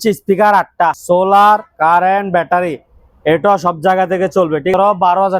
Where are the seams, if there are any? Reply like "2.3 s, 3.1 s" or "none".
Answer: 1.0 s, 4.7 s